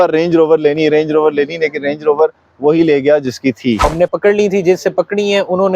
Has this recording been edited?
yes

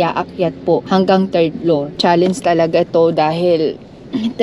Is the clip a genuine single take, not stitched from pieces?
yes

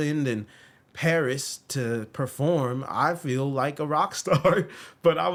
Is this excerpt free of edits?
yes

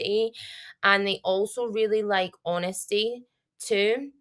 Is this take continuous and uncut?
yes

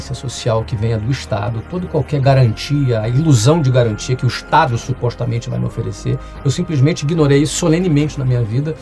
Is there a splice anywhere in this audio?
no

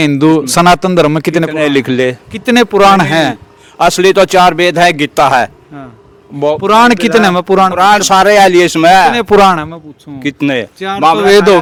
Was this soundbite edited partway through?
no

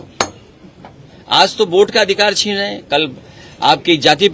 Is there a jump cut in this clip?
no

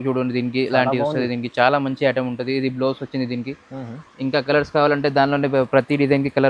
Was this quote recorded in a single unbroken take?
yes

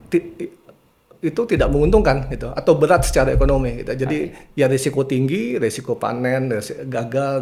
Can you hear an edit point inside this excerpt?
no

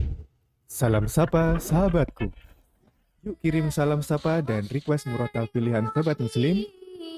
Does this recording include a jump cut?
no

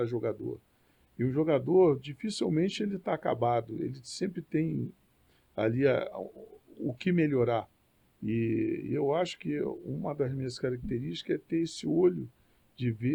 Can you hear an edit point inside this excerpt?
no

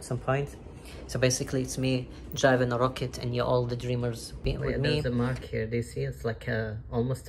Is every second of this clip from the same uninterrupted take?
no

